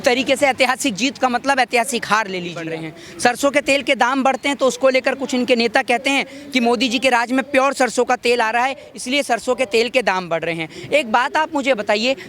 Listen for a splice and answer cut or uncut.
cut